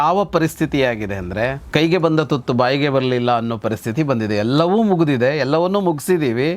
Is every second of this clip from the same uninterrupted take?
no; 1 cut; at 1.6 s

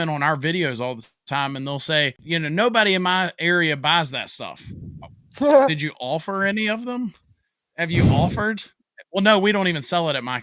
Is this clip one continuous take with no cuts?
no; 1 cut; at 2.2 s

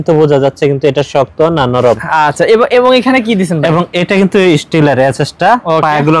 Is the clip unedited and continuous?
yes; 0 cuts

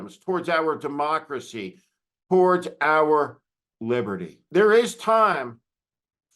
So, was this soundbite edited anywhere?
yes; 1 cut; at 4.3 s

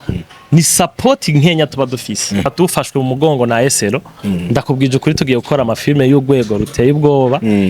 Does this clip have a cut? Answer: yes; 1 cut; at 2.5 s

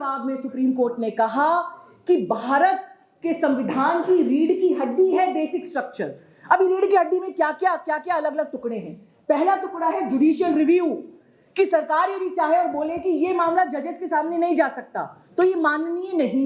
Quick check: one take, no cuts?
yes; 0 cuts

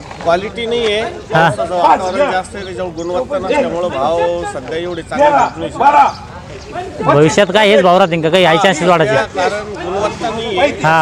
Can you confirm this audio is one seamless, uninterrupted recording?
yes; 0 cuts

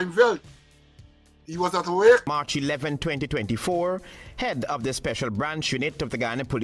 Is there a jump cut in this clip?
yes; 1 cut; at 2.3 s

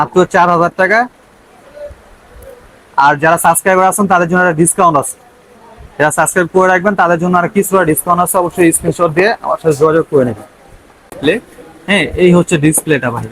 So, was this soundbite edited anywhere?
yes; 1 cut; at 11.1 s

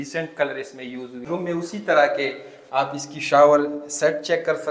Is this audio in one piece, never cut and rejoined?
no; 1 cut; at 1.2 s

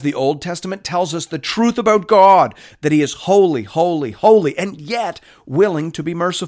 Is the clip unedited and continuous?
yes; 0 cuts

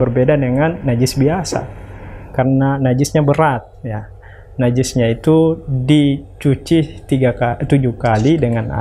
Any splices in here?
no; 0 cuts

